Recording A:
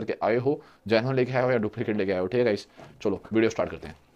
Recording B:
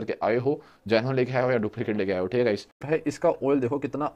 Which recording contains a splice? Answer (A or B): B